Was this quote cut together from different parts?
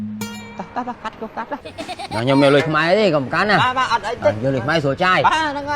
yes; 1 cut; at 1.6 s

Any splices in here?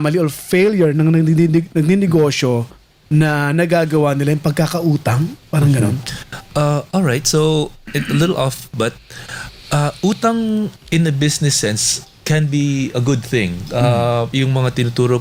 no; 0 cuts

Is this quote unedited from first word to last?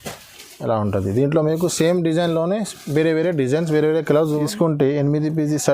no; 1 cut; at 4.4 s

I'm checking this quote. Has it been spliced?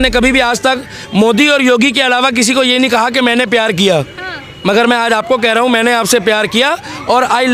no; 0 cuts

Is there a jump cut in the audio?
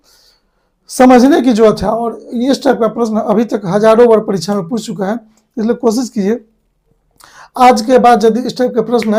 no; 0 cuts

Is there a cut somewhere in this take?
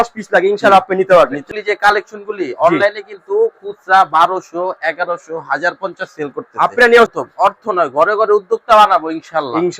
yes; 2 cuts; at 1.5 s, 7.1 s

